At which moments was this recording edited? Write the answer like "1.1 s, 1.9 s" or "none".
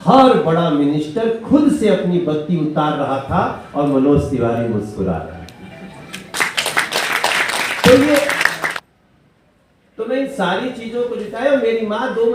8.7 s